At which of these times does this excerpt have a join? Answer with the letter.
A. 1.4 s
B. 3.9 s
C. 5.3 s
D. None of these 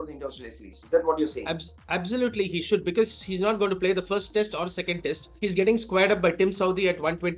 D